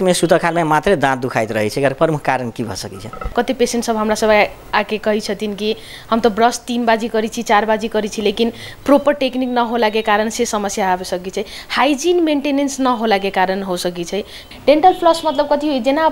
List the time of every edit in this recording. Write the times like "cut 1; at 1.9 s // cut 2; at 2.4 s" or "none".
cut 1; at 3.3 s // cut 2; at 14.4 s